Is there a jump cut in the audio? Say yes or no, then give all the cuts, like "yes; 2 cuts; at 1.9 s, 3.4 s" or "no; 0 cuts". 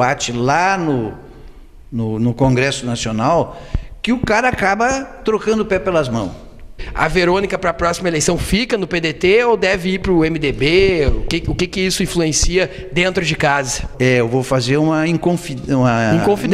yes; 2 cuts; at 6.8 s, 13.9 s